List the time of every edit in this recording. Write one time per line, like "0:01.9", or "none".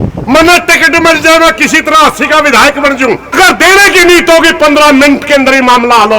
0:03.3